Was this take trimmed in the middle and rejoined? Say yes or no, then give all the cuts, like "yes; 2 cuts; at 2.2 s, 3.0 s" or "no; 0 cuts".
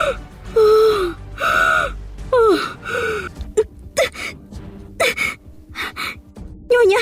yes; 1 cut; at 3.4 s